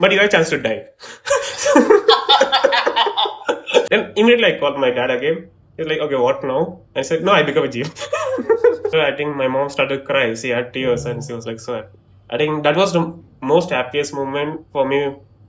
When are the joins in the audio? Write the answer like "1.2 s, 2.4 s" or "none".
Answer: 3.9 s, 8.9 s